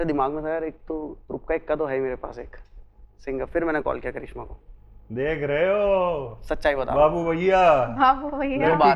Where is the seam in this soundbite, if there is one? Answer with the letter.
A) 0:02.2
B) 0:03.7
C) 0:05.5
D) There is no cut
D